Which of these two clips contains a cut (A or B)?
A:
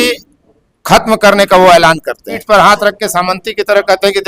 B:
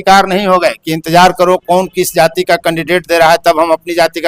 A